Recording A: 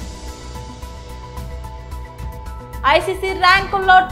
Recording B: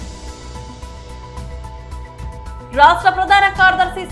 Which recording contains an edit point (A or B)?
B